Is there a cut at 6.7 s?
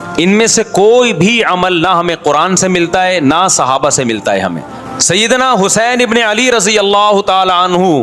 no; 1 cut; at 4.7 s

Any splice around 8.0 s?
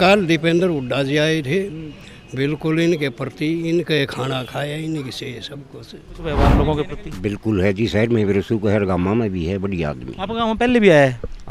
no; 1 cut; at 6.2 s

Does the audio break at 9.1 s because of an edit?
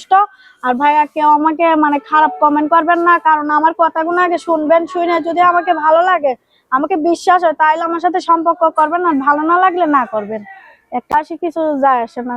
no; 1 cut; at 11.1 s

